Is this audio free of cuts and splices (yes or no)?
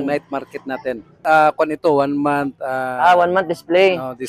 no